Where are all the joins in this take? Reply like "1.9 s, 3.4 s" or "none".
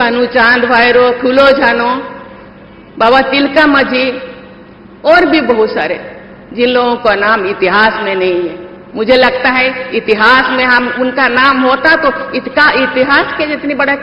none

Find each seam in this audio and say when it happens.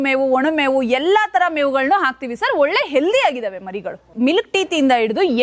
none

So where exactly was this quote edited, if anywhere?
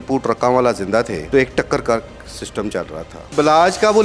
1.2 s, 3.2 s

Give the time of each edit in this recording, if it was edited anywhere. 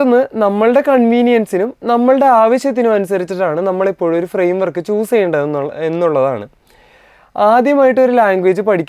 none

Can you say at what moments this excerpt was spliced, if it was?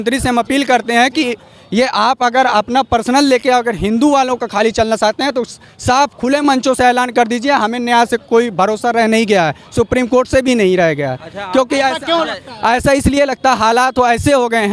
none

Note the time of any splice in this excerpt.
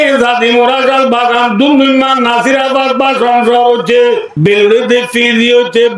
4.3 s

